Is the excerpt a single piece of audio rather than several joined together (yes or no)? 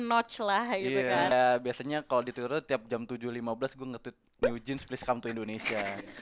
no